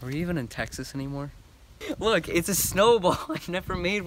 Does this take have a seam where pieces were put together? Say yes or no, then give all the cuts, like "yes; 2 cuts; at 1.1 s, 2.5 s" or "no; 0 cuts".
yes; 1 cut; at 1.7 s